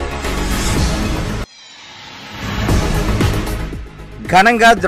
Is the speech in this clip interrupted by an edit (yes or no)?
no